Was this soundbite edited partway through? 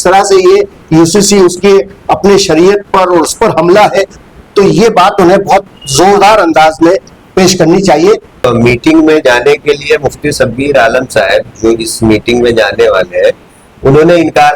yes; 1 cut; at 8.4 s

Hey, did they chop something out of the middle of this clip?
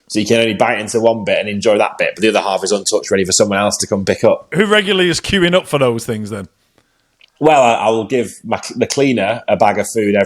yes; 1 cut; at 4.5 s

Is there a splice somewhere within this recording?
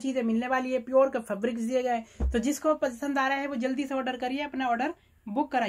no; 0 cuts

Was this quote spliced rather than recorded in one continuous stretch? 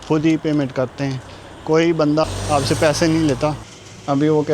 yes; 1 cut; at 3.6 s

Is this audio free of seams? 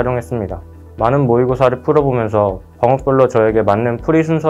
yes; 0 cuts

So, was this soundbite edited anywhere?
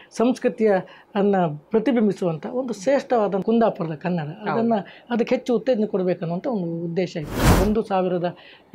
yes; 2 cuts; at 3.4 s, 7.5 s

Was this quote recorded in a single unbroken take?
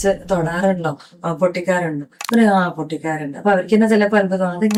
yes; 0 cuts

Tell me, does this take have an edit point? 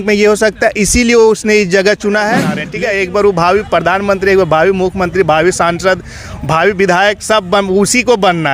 yes; 1 cut; at 2.6 s

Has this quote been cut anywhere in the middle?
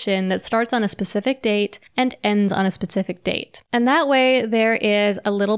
yes; 2 cuts; at 1.8 s, 3.5 s

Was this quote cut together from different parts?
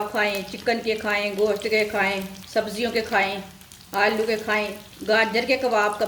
yes; 2 cuts; at 2.3 s, 4.9 s

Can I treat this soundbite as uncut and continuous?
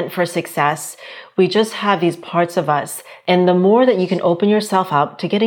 no; 1 cut; at 3.1 s

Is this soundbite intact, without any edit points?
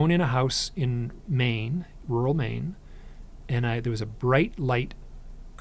yes; 0 cuts

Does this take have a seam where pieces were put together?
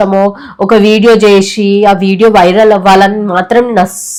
no; 0 cuts

